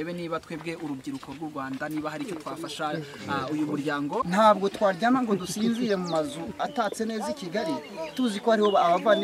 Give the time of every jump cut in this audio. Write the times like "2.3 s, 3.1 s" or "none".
4.3 s